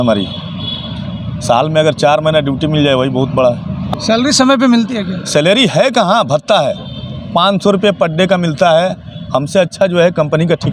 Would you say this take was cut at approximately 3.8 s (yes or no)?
yes